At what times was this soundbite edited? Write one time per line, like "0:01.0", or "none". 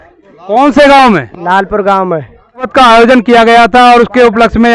0:02.7